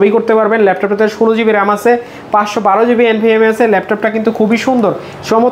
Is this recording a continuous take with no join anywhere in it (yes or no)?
yes